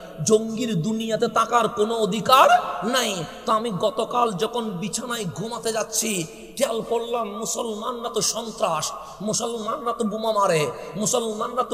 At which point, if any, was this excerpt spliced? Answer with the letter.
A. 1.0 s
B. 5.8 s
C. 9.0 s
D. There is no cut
D